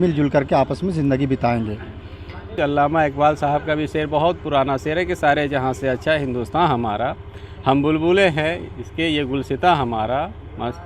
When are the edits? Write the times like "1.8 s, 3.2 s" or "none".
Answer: 2.5 s

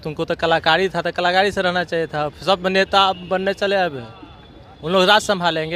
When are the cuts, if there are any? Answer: none

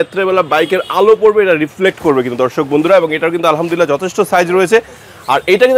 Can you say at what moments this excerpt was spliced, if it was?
none

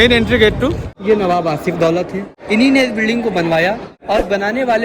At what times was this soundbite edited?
0.9 s, 2.4 s, 3.9 s

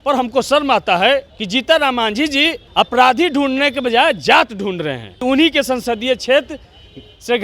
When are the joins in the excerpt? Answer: 1.4 s, 2.6 s, 5.1 s

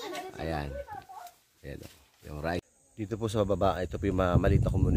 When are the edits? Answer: 2.6 s

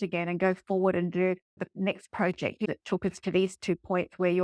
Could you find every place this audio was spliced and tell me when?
1.6 s, 2.7 s

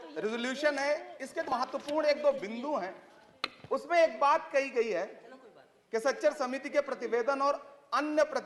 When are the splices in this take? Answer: 1.5 s

